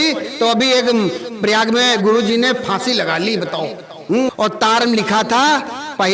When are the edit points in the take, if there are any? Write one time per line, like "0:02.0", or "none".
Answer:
0:04.3